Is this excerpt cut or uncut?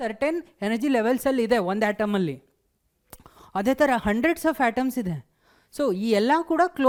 uncut